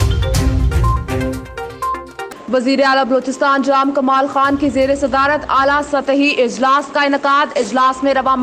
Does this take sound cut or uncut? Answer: cut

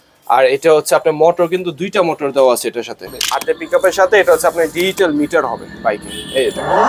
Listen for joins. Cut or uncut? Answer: cut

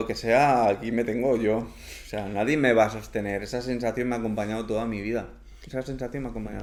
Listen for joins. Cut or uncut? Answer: uncut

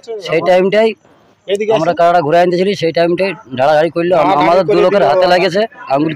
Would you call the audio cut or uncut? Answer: uncut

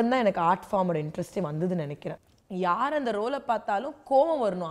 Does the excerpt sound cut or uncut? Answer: cut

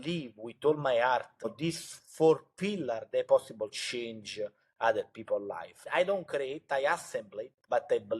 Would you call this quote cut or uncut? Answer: cut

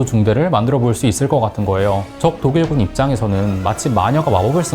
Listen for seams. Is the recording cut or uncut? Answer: cut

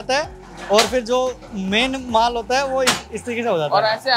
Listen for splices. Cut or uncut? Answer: uncut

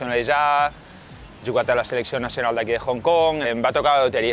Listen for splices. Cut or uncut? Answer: cut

